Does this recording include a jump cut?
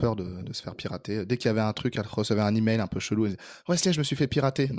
no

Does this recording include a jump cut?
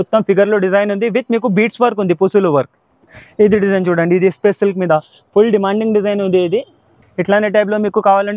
no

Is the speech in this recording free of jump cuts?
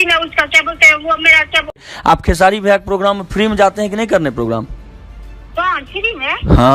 no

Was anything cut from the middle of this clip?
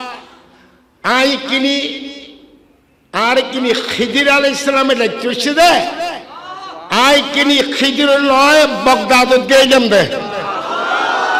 no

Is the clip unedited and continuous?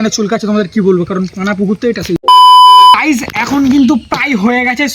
no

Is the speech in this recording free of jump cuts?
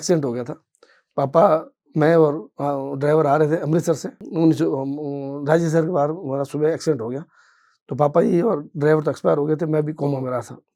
yes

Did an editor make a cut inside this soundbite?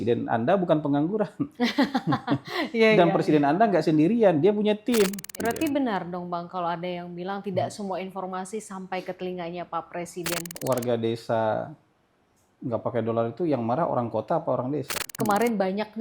yes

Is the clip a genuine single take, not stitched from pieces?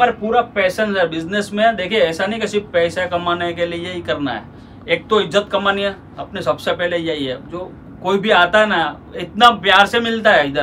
yes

